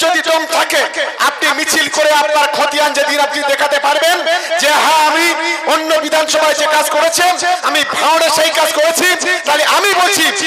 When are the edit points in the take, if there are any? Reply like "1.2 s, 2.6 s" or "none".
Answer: 1.1 s